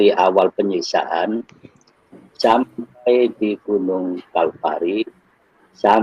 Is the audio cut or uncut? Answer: uncut